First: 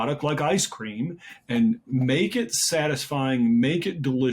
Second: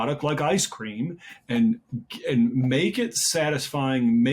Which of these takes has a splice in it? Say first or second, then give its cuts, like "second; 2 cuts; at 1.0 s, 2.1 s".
first; 1 cut; at 1.9 s